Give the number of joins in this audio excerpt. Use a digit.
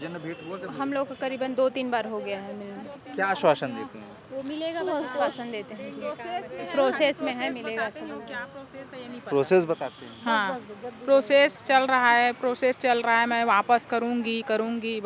0